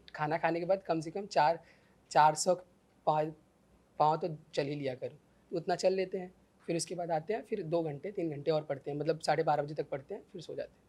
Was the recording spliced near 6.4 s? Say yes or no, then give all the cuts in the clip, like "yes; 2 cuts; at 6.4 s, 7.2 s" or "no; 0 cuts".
no; 0 cuts